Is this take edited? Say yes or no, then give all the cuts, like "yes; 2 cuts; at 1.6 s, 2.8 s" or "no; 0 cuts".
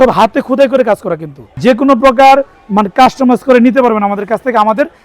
yes; 1 cut; at 1.6 s